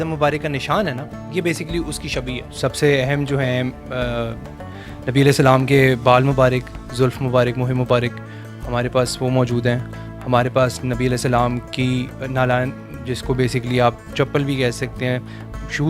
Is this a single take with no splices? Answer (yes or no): no